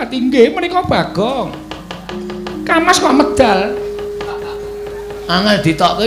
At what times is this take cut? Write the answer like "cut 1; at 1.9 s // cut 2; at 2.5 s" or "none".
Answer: none